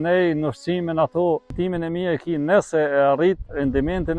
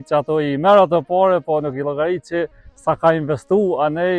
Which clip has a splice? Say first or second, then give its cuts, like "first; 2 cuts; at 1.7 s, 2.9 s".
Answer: first; 1 cut; at 1.5 s